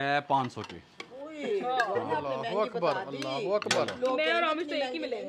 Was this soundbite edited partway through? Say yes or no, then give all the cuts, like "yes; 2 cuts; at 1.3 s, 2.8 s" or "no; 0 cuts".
no; 0 cuts